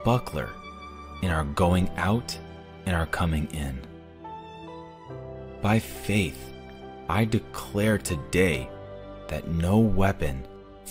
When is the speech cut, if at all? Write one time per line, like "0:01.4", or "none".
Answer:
0:03.8
0:05.6